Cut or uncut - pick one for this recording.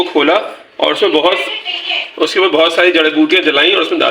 uncut